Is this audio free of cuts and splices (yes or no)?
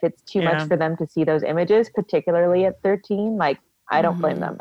yes